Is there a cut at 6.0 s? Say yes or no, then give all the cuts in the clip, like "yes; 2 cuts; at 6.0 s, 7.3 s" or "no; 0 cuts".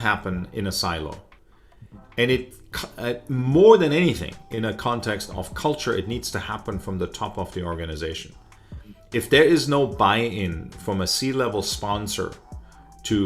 no; 0 cuts